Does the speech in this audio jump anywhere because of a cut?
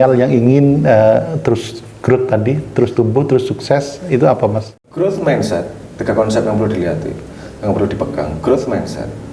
yes; 1 cut; at 4.8 s

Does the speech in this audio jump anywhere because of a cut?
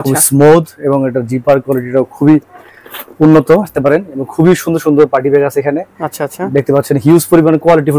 yes; 1 cut; at 3.7 s

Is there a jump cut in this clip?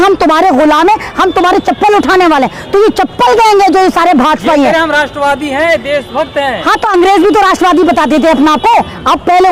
no; 0 cuts

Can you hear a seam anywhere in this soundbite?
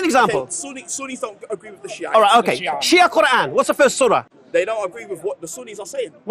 yes; 1 cut; at 4.4 s

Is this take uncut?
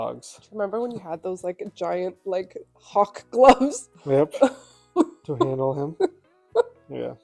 yes; 0 cuts

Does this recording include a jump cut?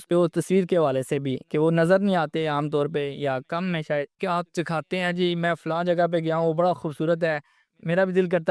yes; 1 cut; at 4.2 s

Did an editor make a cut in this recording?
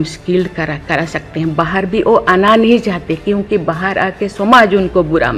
no; 0 cuts

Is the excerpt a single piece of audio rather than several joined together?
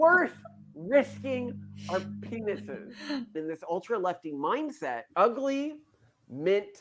no; 2 cuts; at 3.3 s, 5.1 s

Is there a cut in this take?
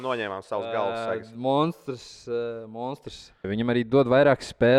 yes; 1 cut; at 3.5 s

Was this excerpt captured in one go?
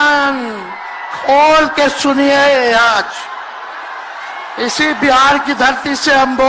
yes; 0 cuts

